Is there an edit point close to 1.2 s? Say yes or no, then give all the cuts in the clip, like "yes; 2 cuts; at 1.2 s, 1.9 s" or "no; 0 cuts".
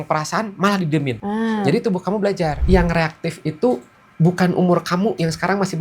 yes; 2 cuts; at 1.2 s, 2.6 s